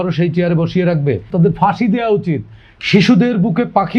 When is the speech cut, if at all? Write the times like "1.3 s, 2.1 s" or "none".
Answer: 1.3 s